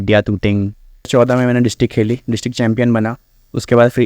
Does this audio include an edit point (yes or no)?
yes